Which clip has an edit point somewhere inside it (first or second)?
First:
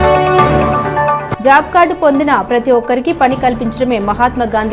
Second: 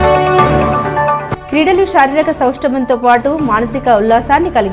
second